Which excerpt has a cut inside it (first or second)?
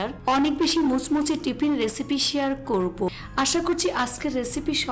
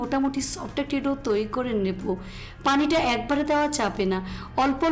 first